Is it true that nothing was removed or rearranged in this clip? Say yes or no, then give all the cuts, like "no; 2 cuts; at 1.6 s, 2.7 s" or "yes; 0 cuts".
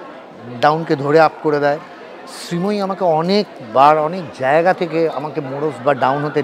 yes; 0 cuts